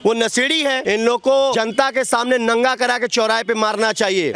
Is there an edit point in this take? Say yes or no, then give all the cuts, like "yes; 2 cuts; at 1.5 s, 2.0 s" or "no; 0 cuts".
yes; 2 cuts; at 0.8 s, 1.5 s